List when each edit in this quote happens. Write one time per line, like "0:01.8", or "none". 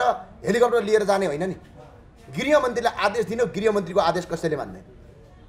none